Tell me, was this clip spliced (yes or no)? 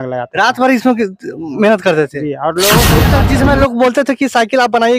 yes